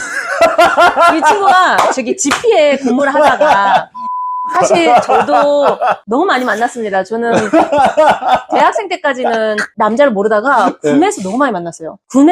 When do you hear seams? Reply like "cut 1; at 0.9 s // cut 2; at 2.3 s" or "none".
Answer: cut 1; at 4.5 s